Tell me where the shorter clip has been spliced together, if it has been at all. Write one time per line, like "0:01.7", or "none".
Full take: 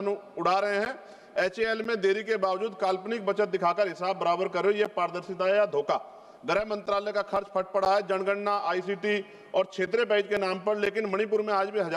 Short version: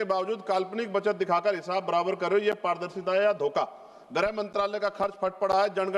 none

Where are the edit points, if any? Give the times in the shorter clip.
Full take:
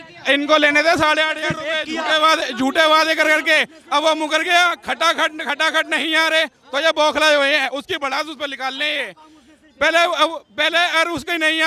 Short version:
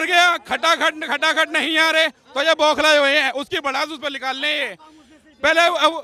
none

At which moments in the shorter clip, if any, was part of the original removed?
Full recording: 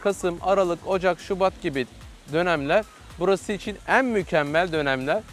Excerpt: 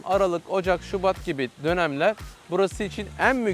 0:01.5

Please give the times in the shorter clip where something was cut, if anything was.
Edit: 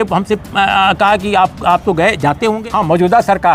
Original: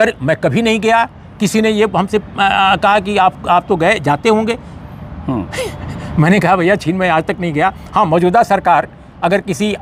0:02.6

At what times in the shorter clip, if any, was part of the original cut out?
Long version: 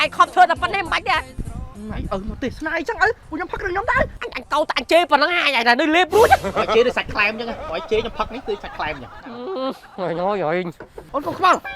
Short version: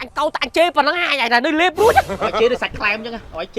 none

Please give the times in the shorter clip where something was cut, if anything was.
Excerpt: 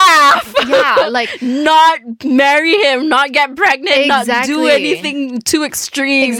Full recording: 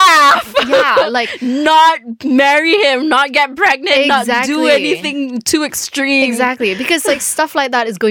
none

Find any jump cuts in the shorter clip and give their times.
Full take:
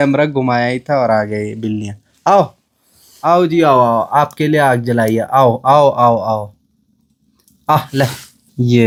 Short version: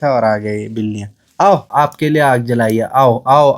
0:01.7

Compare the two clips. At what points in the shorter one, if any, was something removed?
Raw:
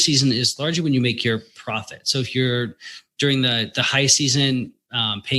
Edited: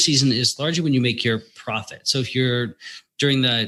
none

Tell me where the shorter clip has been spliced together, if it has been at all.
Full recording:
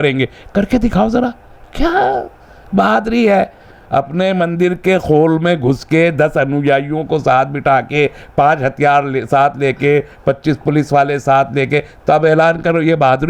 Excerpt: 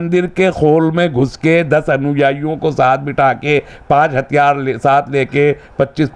none

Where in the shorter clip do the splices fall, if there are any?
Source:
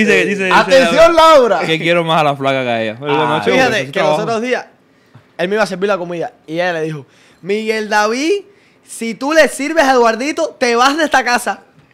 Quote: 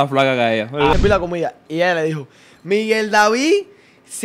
0:00.9

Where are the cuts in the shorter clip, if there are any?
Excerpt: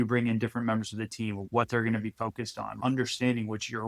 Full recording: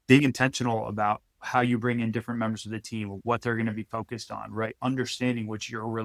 0:02.8

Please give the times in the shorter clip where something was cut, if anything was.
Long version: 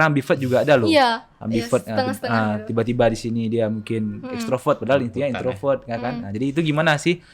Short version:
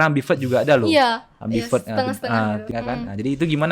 0:02.7

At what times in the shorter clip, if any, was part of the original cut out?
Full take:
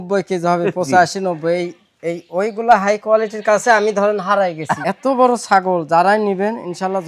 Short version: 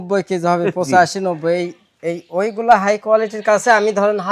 none

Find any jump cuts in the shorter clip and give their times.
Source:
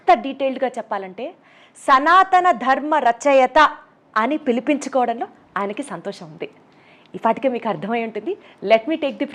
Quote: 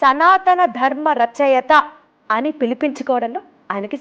none

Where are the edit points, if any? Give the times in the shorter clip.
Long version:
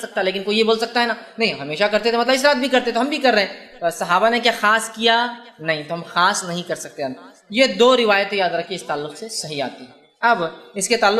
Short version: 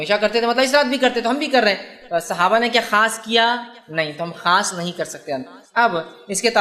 0:05.6

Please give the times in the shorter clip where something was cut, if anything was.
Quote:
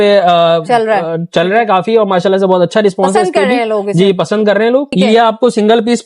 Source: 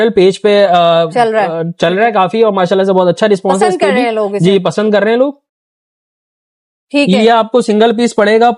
0:04.9

